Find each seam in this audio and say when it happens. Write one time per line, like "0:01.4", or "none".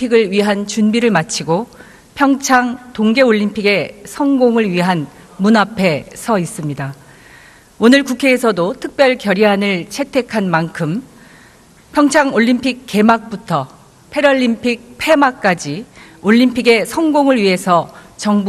none